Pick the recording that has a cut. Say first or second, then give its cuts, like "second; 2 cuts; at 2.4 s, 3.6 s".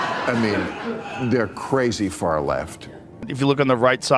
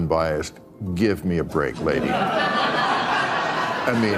first; 1 cut; at 3.2 s